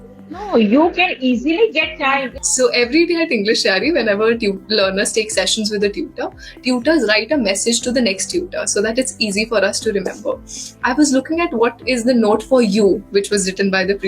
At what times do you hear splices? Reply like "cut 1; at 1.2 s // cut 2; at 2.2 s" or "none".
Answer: cut 1; at 2.0 s